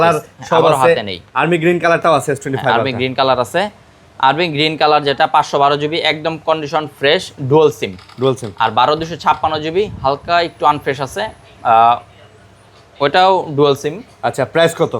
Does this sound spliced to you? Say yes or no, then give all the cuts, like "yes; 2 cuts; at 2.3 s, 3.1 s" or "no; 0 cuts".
no; 0 cuts